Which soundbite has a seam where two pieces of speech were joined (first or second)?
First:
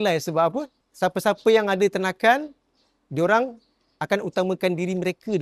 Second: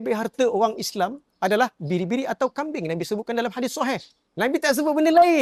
second